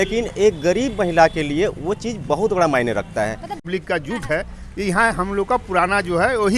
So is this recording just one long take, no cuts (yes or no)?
no